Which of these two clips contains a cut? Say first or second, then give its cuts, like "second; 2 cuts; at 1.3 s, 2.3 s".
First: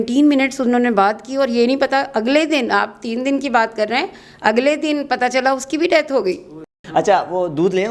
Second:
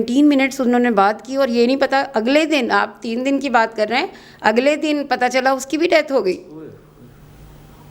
first; 1 cut; at 6.8 s